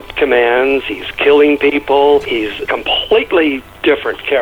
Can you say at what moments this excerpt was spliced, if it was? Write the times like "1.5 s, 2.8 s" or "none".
2.6 s